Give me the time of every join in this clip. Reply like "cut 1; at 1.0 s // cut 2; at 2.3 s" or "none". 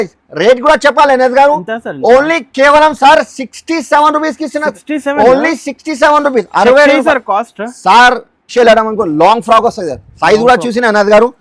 cut 1; at 8.4 s